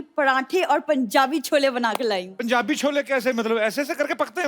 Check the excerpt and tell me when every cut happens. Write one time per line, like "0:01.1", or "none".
0:02.3